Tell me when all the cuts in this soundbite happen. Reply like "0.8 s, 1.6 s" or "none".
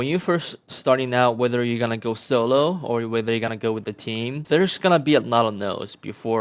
4.4 s